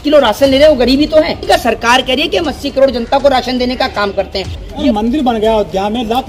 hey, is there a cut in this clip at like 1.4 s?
yes; 2 cuts; at 1.4 s, 4.7 s

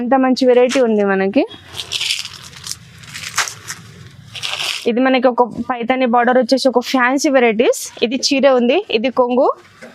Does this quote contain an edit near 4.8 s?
yes; 1 cut; at 4.8 s

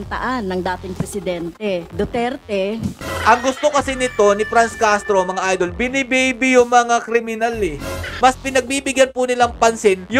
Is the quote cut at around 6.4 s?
no; 3 cuts; at 1.9 s, 3.0 s, 8.1 s

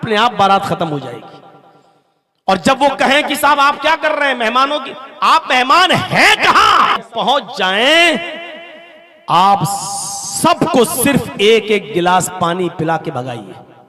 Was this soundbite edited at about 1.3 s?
no; 1 cut; at 7.0 s

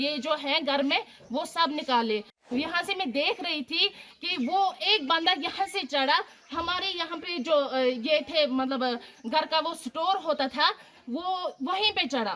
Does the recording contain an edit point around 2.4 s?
yes; 1 cut; at 2.4 s

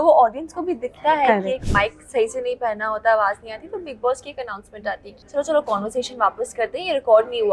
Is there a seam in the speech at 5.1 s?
yes; 2 cuts; at 1.6 s, 5.1 s

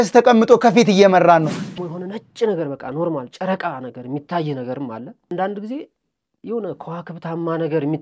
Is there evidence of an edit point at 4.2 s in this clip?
no; 1 cut; at 1.6 s

